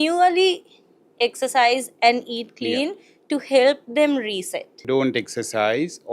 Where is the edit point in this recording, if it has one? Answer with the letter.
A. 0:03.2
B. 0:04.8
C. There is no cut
B